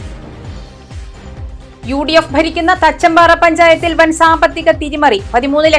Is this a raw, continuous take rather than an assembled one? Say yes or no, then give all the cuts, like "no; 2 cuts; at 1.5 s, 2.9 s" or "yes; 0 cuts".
yes; 0 cuts